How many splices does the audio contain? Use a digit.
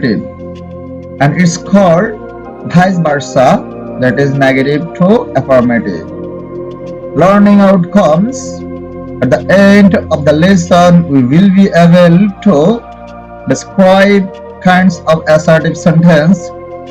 0